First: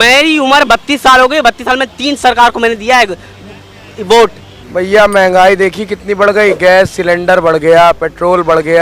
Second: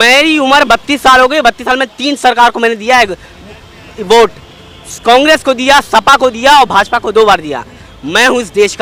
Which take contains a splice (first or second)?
first